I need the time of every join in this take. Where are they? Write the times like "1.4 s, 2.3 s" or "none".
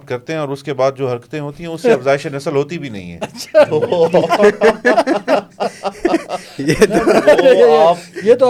none